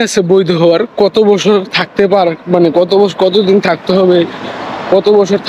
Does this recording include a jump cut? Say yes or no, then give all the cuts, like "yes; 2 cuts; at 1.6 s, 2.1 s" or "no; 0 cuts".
no; 0 cuts